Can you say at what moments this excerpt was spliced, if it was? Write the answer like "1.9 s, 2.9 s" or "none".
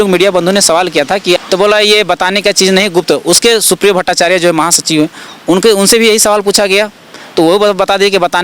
1.4 s

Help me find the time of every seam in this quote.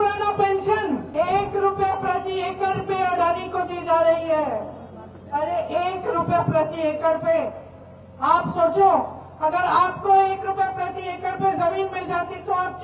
1.1 s

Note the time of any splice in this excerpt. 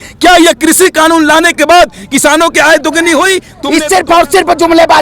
3.5 s

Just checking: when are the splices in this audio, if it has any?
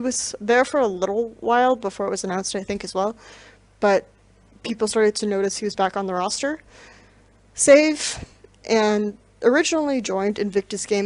5.3 s

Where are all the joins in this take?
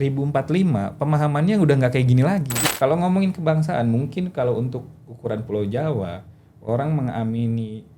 2.6 s

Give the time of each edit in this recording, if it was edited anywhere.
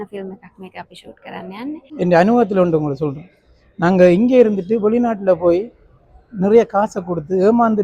1.8 s

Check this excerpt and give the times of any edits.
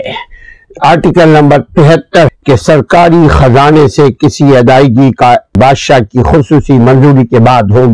2.3 s, 5.5 s

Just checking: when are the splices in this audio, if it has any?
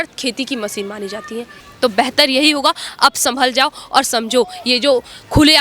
1.6 s

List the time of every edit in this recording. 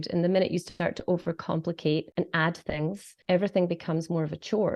2.1 s, 3.1 s

